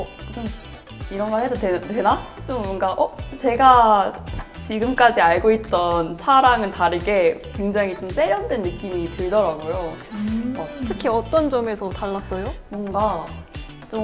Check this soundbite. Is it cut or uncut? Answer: uncut